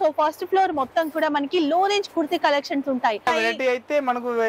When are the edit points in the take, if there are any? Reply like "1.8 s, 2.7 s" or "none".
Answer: 3.3 s